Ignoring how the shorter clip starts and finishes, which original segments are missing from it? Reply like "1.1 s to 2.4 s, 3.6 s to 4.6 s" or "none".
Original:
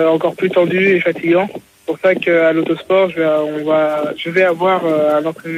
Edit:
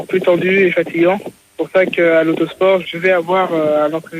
3.1 s to 4.2 s

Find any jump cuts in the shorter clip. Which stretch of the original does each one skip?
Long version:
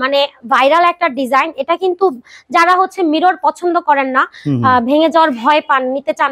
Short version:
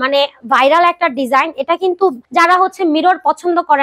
2.2 s to 2.4 s

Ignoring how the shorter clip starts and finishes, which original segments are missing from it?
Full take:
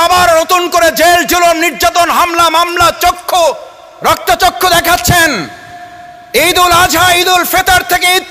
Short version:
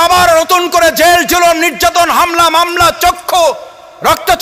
none

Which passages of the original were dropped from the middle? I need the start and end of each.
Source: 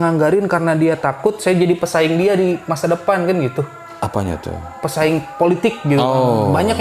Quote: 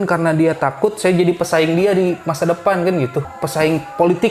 3.8 s to 4.8 s

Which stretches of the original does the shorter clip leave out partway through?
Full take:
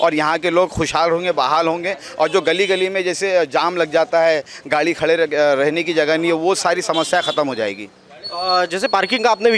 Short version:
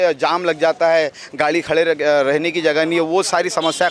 none

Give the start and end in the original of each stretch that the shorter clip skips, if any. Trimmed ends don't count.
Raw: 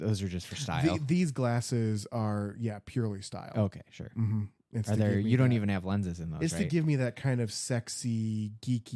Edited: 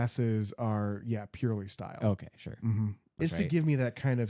4.6 s to 6.2 s

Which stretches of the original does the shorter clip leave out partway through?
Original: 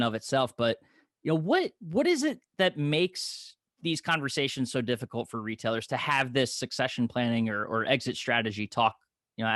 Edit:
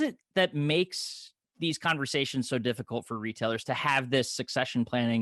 none

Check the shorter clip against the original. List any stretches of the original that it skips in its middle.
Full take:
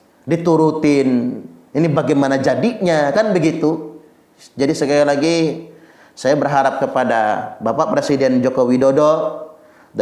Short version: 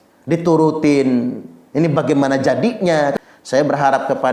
3.1 s to 5.9 s

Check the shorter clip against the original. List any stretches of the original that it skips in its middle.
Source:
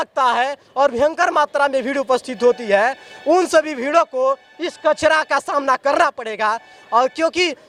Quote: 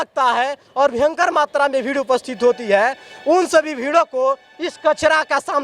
none

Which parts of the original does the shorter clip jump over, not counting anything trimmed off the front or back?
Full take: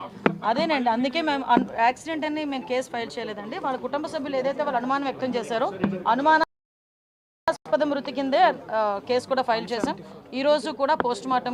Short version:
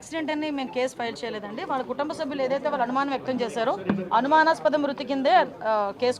6.5 s to 7.6 s

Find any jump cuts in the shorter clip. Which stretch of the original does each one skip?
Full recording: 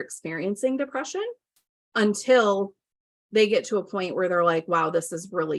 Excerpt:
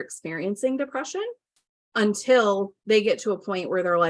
2.7 s to 3.2 s

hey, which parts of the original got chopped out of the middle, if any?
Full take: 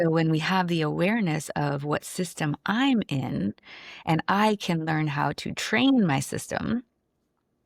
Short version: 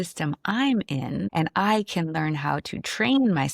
3.5 s to 4.0 s

